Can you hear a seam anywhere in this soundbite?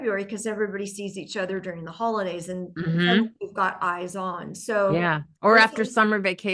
no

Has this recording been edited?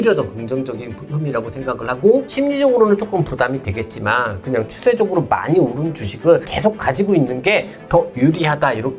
yes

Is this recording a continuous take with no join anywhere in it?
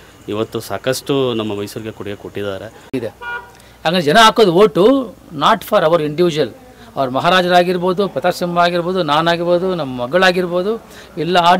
no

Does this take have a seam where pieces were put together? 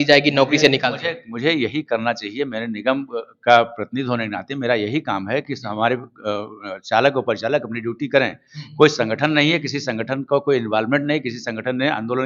no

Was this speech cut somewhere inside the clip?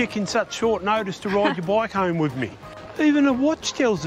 yes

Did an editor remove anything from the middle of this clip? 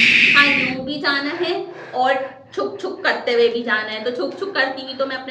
no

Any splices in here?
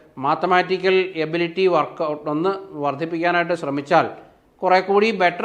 no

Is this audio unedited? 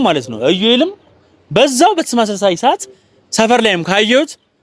yes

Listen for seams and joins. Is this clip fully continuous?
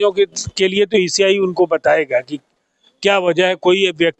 yes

